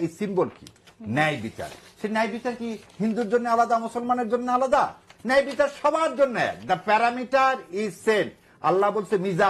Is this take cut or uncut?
uncut